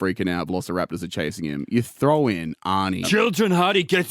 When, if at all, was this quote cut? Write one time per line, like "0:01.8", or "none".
0:03.0